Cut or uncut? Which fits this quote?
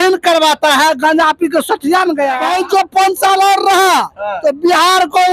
cut